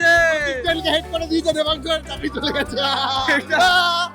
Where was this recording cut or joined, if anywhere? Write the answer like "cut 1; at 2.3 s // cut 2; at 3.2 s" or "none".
none